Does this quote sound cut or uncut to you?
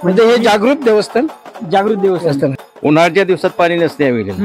cut